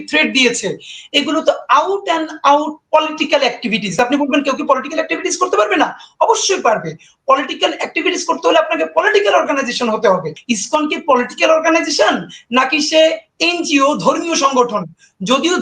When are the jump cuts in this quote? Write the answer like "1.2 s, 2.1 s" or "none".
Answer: 3.9 s, 10.4 s